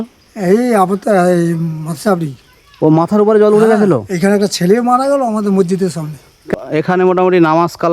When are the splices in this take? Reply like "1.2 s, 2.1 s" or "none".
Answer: 6.5 s